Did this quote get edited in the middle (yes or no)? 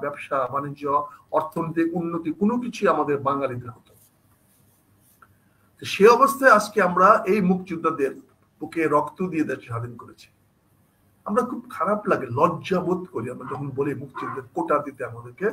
no